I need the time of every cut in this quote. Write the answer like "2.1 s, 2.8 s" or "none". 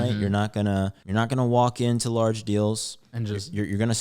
1.0 s